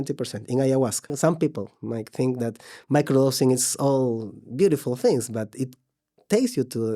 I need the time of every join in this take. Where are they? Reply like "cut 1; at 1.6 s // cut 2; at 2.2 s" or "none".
cut 1; at 1.1 s